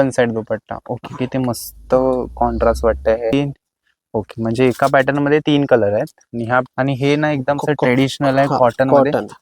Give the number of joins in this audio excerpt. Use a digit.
2